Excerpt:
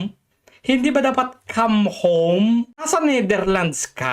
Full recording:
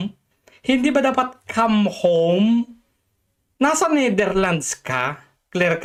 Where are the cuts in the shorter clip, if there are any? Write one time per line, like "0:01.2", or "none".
0:02.9